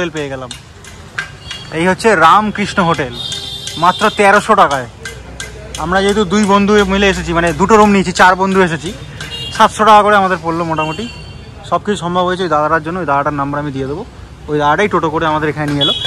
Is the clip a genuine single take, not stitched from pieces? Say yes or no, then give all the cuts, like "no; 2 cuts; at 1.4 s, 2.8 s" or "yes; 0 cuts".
yes; 0 cuts